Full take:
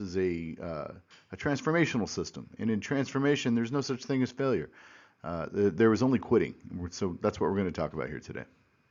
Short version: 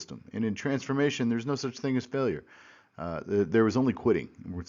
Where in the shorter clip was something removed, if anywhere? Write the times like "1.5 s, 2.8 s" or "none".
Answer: none